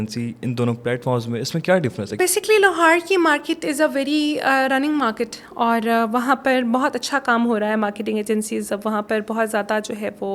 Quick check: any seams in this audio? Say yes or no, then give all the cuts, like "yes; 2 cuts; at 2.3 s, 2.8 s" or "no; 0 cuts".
no; 0 cuts